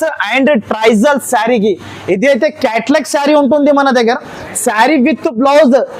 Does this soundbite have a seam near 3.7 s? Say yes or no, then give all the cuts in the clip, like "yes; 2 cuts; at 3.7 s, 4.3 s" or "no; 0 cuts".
no; 0 cuts